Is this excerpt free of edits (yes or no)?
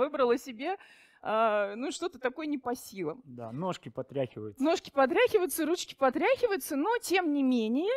yes